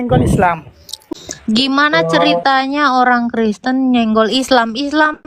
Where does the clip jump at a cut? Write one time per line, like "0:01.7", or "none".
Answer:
0:01.0

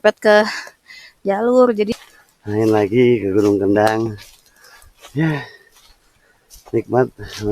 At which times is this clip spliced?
0:01.9

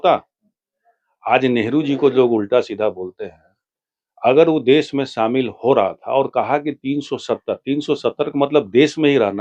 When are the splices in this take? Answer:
none

